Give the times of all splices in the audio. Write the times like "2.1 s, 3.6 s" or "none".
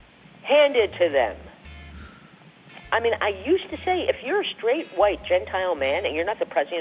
none